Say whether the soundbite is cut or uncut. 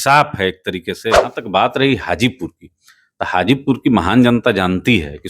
cut